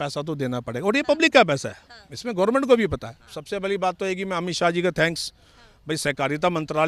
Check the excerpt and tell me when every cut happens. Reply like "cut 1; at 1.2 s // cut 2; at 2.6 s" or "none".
none

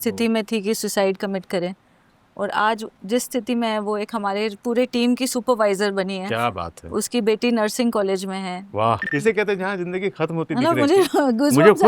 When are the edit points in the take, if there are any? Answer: cut 1; at 9.0 s

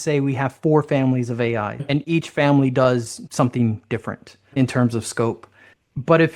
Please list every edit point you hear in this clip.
cut 1; at 1.8 s // cut 2; at 4.5 s

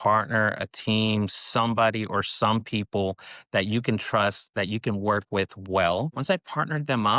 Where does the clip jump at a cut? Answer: cut 1; at 6.1 s

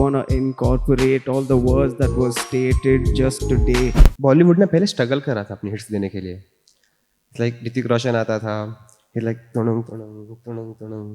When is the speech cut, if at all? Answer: cut 1; at 4.0 s

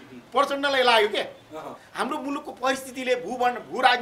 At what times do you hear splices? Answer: cut 1; at 1.8 s

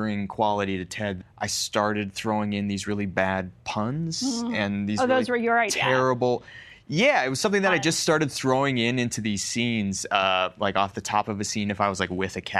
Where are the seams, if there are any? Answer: cut 1; at 1.2 s

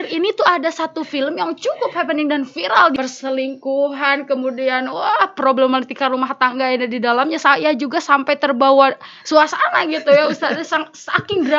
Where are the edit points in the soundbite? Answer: cut 1; at 3.0 s

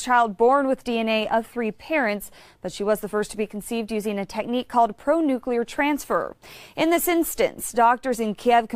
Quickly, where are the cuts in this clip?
cut 1; at 1.2 s

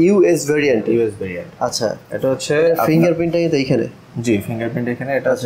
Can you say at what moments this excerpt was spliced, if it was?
none

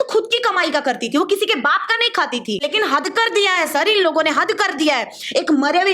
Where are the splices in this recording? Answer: cut 1; at 2.6 s

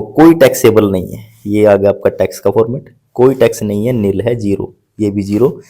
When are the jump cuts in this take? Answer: none

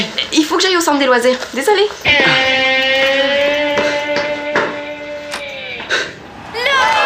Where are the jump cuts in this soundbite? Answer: none

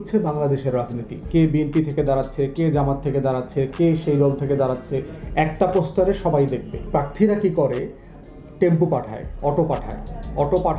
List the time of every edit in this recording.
cut 1; at 1.3 s // cut 2; at 6.9 s

